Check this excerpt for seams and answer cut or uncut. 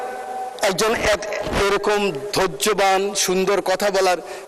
uncut